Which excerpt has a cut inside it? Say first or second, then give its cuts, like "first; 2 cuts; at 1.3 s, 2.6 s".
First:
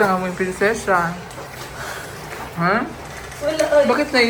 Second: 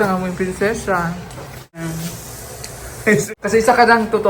second; 2 cuts; at 1.8 s, 3.3 s